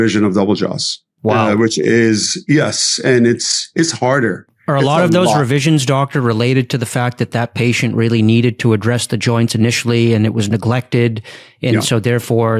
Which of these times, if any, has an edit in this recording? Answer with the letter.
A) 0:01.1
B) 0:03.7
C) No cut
A